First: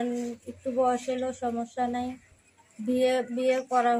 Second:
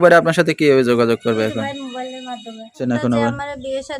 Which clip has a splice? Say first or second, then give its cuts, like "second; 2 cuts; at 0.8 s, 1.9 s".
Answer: second; 1 cut; at 2.7 s